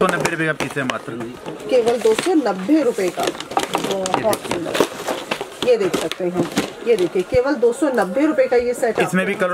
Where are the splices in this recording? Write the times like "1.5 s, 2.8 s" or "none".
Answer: none